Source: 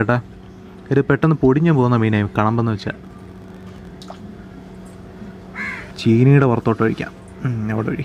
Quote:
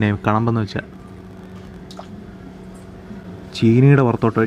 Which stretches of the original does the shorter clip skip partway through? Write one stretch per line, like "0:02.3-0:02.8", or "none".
0:05.5-0:05.8